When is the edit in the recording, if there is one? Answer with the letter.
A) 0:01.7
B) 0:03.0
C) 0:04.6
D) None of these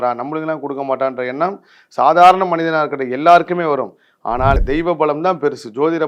C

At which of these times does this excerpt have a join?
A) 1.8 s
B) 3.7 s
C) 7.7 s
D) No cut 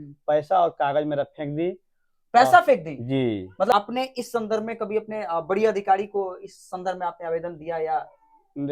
B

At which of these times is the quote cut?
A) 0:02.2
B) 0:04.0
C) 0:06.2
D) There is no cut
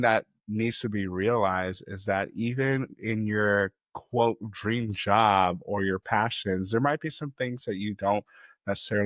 D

